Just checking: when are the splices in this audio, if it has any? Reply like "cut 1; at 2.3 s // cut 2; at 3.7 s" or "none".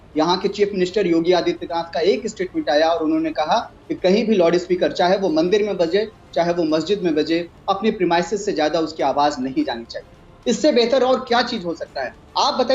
none

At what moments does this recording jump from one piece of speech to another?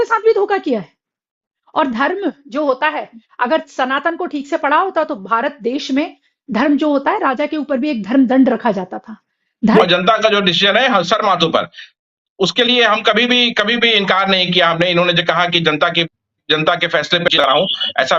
cut 1; at 9.8 s

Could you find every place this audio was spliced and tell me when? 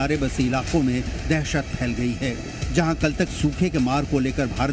none

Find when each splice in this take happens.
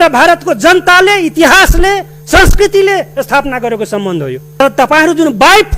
cut 1; at 4.6 s

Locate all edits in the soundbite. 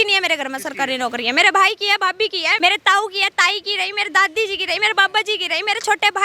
cut 1; at 2.5 s

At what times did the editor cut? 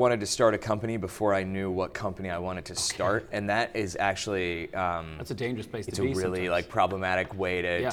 none

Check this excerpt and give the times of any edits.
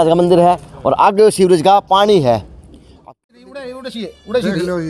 cut 1; at 3.1 s

